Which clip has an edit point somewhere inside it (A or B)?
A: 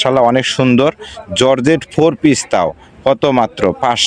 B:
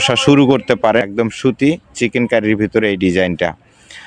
B